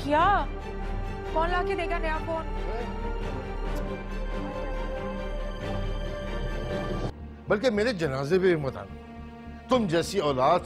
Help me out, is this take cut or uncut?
cut